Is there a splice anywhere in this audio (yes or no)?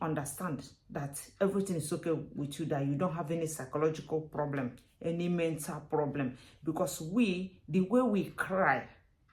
no